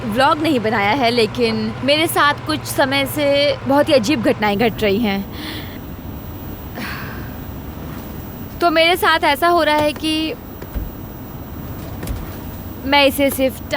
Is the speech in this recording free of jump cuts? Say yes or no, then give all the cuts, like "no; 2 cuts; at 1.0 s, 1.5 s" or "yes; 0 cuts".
no; 2 cuts; at 1.8 s, 3.6 s